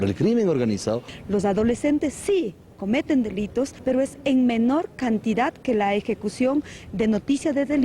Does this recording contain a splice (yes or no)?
yes